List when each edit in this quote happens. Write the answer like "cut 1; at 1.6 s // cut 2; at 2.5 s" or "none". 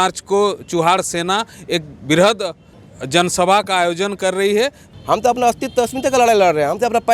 cut 1; at 4.9 s